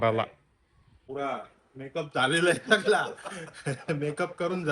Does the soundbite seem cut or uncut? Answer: cut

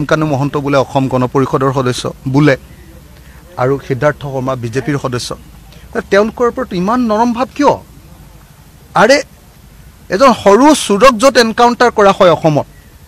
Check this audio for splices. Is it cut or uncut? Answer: uncut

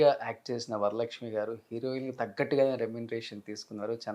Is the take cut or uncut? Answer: uncut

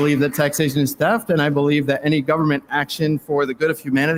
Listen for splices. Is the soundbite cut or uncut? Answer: uncut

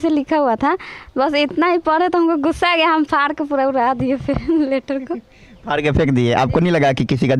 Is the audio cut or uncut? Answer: uncut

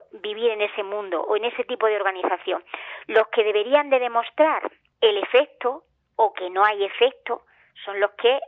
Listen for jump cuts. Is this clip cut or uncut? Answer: cut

